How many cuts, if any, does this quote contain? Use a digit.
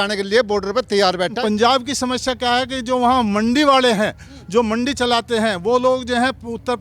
1